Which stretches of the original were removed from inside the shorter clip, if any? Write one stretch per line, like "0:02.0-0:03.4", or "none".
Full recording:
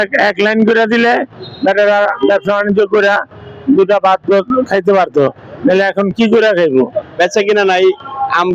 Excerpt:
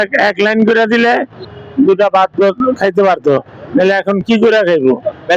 0:01.4-0:03.3